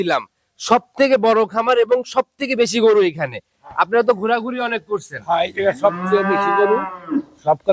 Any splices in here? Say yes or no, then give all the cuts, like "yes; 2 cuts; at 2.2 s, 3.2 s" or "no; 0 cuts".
no; 0 cuts